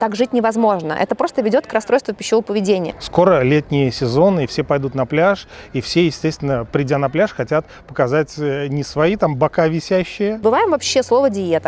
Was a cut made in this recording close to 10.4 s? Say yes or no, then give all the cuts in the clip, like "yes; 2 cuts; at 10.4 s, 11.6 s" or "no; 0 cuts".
yes; 2 cuts; at 2.9 s, 10.4 s